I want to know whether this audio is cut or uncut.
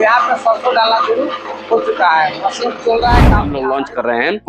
cut